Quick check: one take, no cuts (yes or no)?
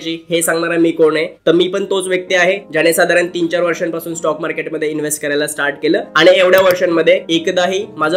yes